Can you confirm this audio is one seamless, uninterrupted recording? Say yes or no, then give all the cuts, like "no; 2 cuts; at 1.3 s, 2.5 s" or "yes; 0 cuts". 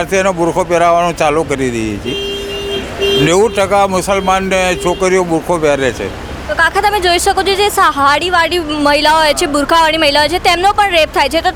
yes; 0 cuts